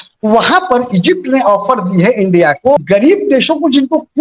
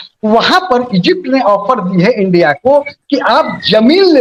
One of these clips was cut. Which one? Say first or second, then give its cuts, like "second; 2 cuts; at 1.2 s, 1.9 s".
first; 1 cut; at 2.8 s